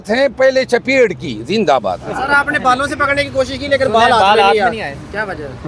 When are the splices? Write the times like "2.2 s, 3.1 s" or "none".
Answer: 2.2 s